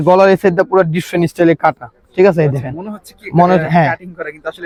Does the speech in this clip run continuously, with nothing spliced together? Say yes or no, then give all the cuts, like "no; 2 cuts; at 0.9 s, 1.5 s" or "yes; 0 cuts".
yes; 0 cuts